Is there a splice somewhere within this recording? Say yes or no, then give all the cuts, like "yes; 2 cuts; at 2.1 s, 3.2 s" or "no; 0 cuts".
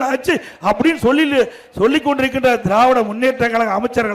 no; 0 cuts